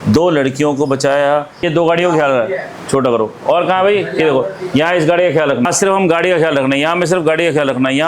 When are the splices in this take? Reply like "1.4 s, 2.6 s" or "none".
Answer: 1.7 s, 5.7 s

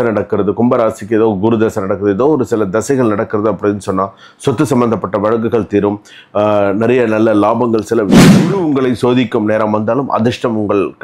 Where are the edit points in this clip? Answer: 8.4 s

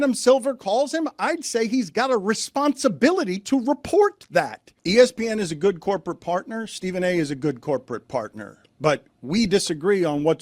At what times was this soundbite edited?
4.8 s

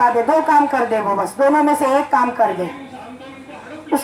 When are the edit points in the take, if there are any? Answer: none

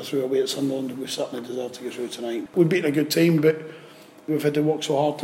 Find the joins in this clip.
2.5 s, 4.3 s

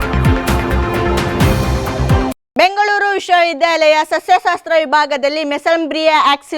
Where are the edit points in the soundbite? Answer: 2.4 s

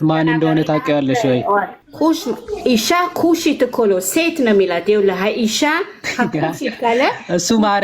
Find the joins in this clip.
1.8 s

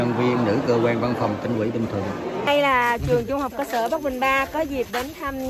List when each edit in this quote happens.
2.5 s

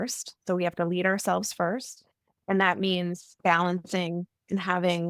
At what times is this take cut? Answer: 3.4 s

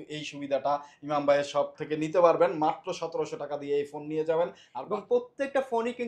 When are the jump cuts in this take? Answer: 4.7 s

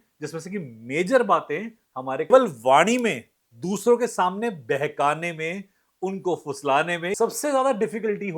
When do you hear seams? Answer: 2.3 s, 7.2 s

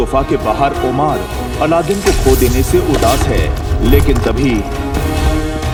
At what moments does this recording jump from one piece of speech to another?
none

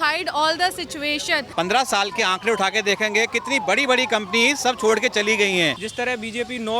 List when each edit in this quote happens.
1.5 s, 5.8 s

